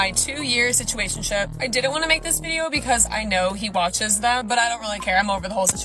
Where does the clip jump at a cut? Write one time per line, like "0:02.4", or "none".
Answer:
none